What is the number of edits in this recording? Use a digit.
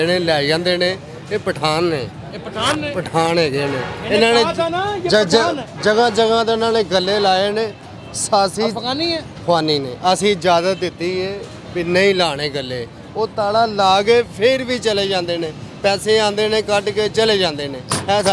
0